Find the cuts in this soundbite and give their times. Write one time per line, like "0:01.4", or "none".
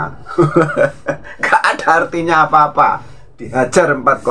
none